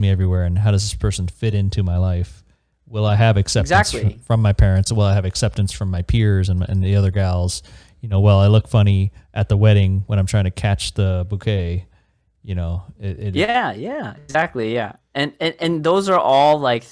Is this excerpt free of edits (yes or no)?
yes